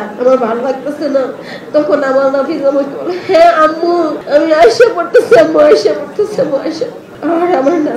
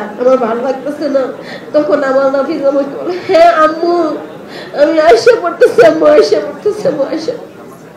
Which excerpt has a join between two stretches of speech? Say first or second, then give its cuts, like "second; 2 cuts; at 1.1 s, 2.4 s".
first; 2 cuts; at 4.2 s, 7.1 s